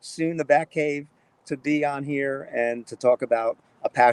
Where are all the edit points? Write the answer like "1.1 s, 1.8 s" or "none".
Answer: none

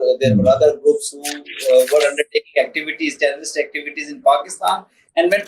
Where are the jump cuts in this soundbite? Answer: none

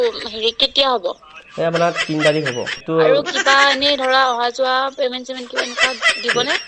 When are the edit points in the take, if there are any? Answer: 2.8 s

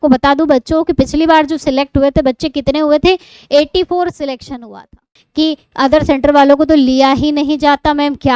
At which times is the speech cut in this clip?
5.2 s

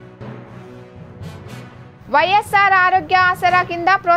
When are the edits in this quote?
none

